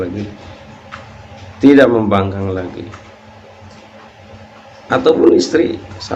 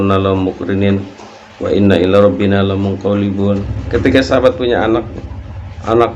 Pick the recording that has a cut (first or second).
second